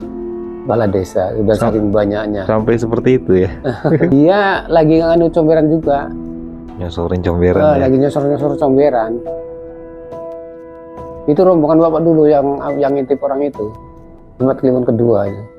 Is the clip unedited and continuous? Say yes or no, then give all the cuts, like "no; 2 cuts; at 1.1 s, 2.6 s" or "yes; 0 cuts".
no; 1 cut; at 4.1 s